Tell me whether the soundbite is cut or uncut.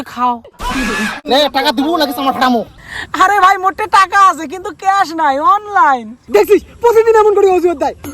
cut